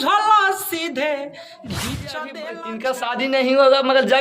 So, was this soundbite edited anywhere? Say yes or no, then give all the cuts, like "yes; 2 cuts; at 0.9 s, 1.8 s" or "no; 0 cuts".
yes; 1 cut; at 2.8 s